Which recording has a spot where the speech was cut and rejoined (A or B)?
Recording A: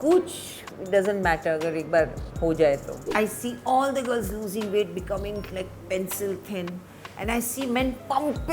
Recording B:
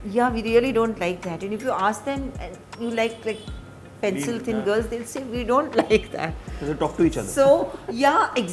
A